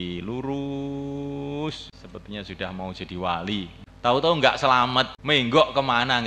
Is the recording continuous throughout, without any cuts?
no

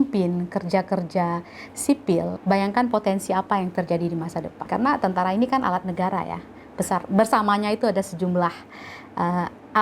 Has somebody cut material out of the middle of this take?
yes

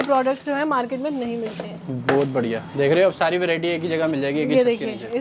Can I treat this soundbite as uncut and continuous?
yes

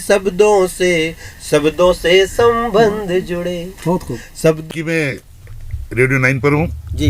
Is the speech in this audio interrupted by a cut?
yes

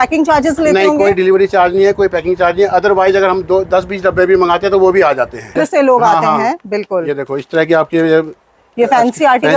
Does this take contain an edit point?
yes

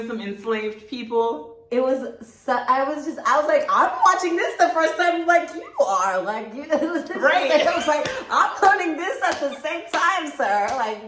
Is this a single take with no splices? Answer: yes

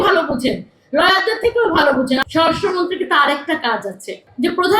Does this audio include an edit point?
yes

